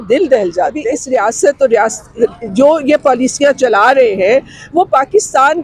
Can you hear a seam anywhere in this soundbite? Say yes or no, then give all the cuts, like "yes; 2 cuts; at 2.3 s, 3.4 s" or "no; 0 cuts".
yes; 1 cut; at 0.9 s